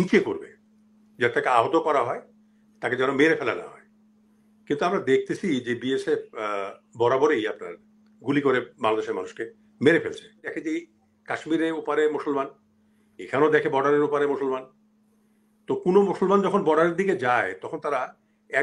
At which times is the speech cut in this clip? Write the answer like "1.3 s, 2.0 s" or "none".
10.5 s